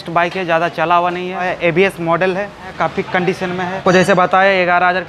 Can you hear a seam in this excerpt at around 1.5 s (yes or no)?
yes